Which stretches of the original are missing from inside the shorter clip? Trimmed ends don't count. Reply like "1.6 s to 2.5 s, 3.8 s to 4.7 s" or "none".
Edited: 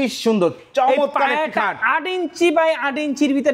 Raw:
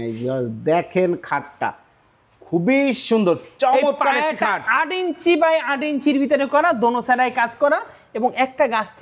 none